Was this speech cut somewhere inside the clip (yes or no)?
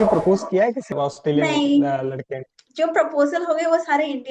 yes